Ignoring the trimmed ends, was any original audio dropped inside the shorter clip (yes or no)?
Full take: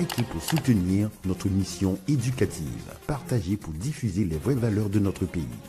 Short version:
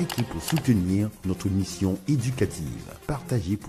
no